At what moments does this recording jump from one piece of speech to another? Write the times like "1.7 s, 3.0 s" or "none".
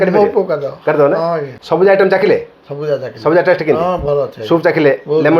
1.5 s

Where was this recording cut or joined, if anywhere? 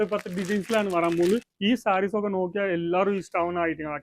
1.5 s

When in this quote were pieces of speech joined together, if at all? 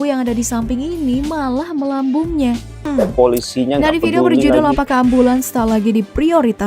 2.7 s

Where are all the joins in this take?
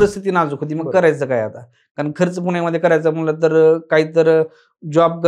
none

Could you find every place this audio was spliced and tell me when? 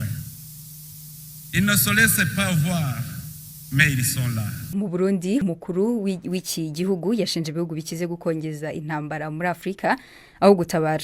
4.5 s, 5.4 s

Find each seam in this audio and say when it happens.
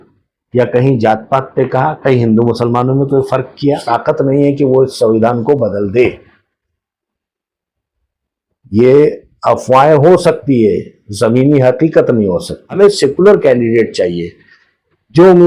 3.8 s, 12.6 s

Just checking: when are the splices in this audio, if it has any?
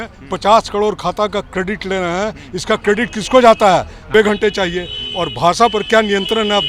4.0 s

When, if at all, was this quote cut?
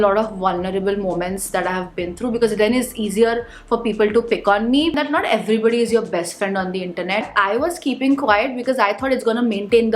5.0 s, 7.3 s

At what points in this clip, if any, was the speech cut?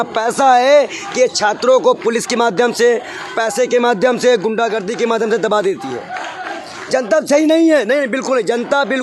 none

